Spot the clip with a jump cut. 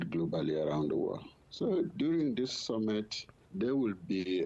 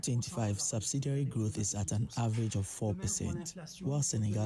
first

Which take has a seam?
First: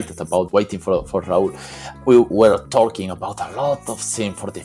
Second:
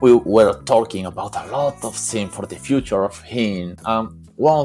second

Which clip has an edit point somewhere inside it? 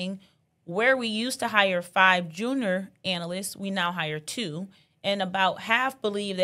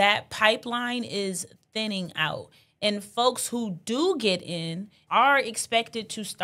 second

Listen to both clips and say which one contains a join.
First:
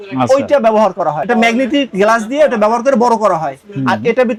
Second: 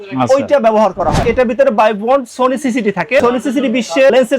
second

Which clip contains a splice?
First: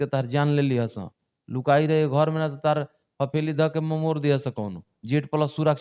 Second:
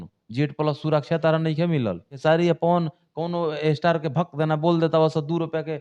second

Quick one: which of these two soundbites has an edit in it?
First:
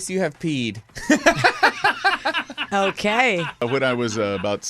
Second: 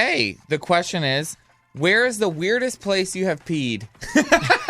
first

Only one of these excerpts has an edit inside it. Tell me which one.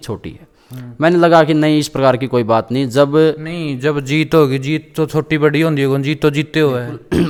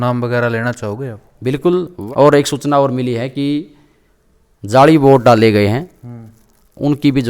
second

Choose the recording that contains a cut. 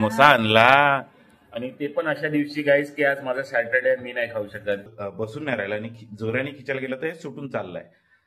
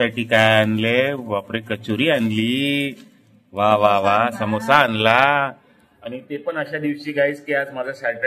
first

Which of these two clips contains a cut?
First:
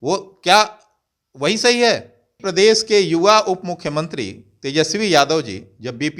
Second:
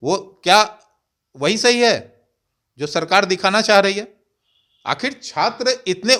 first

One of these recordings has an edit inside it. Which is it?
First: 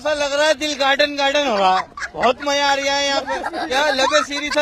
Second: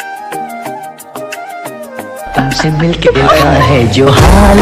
second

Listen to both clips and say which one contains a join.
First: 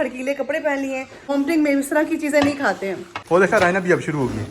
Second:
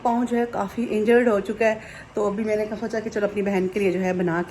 first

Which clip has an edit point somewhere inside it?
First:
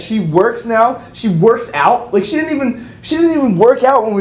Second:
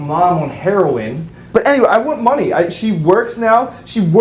second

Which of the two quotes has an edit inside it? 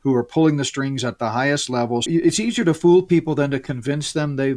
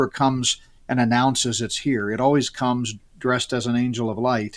first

